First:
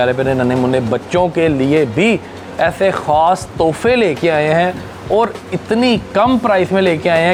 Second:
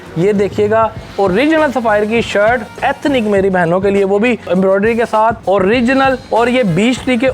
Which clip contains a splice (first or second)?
second